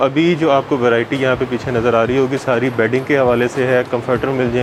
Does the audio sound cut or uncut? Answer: uncut